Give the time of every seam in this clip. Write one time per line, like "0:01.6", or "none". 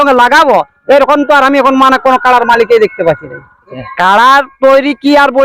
0:03.7